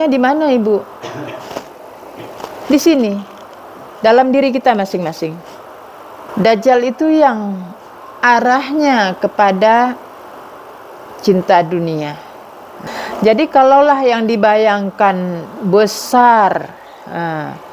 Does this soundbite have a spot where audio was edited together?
yes; 2 cuts; at 6.3 s, 12.8 s

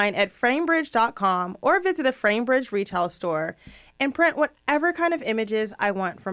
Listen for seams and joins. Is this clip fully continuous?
yes; 0 cuts

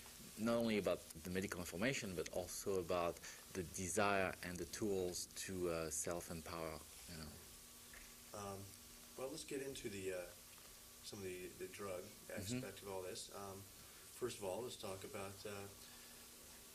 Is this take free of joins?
yes; 0 cuts

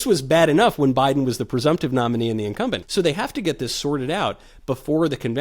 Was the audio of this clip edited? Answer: yes; 1 cut; at 2.8 s

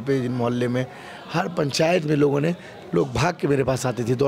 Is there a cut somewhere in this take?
no; 0 cuts

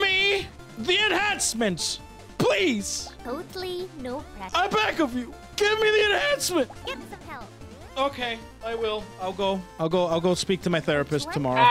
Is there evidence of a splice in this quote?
yes; 3 cuts; at 4.4 s, 6.8 s, 9.7 s

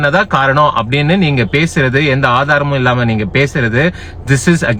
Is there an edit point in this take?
no; 0 cuts

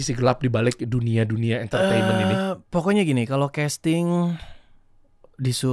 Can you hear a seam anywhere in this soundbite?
no; 0 cuts

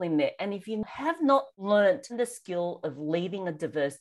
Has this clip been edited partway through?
yes; 2 cuts; at 1.2 s, 2.1 s

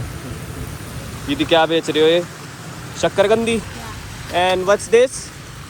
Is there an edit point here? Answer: no; 0 cuts

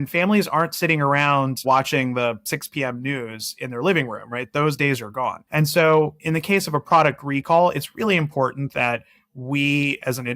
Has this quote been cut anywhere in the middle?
yes; 1 cut; at 5.4 s

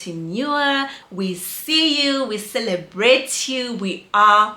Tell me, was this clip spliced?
yes; 1 cut; at 1.0 s

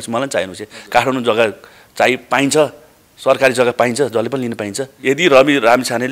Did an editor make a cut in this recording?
yes; 1 cut; at 5.0 s

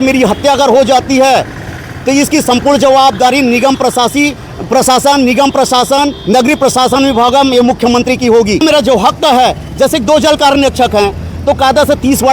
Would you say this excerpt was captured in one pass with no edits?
yes; 0 cuts

